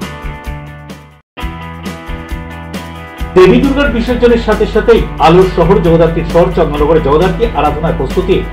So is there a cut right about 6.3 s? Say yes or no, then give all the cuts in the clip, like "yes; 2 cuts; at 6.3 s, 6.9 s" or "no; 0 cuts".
no; 1 cut; at 1.3 s